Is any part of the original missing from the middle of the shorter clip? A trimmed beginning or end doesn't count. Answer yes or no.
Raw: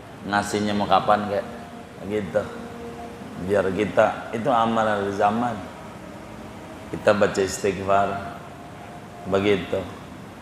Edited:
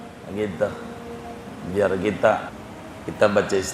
yes